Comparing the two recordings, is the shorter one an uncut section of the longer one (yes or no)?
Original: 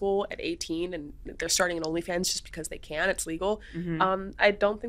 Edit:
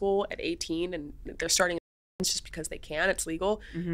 yes